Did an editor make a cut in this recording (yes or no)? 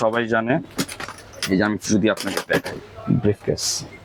no